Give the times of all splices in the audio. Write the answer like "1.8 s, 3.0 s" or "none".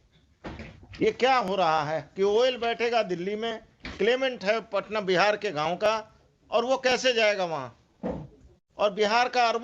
none